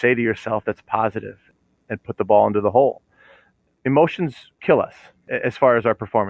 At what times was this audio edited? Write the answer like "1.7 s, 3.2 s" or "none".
1.4 s, 3.4 s, 4.5 s, 5.3 s